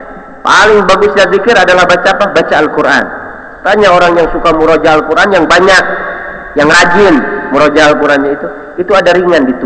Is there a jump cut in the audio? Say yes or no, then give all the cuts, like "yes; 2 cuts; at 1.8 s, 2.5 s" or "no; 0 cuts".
no; 0 cuts